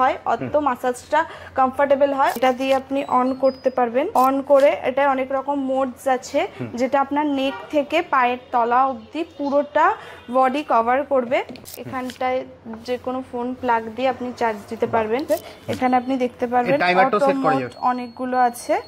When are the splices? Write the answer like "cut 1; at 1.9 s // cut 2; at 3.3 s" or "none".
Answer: cut 1; at 2.4 s // cut 2; at 4.1 s // cut 3; at 11.6 s // cut 4; at 15.2 s